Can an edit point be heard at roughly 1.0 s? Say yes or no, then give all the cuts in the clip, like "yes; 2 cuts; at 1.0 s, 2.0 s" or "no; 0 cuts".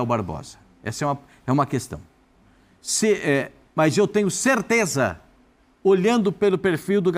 no; 0 cuts